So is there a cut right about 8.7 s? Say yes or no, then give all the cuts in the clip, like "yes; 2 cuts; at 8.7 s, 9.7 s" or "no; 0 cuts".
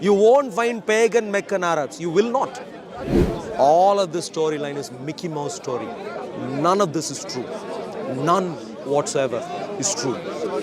no; 1 cut; at 3.3 s